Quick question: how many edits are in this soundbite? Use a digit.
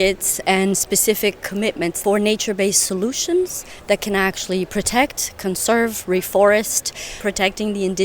2